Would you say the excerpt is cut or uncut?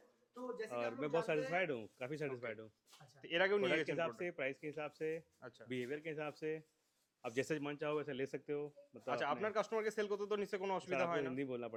uncut